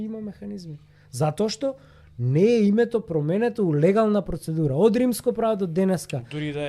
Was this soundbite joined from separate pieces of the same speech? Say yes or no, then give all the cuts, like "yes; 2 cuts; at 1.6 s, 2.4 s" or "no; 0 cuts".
no; 0 cuts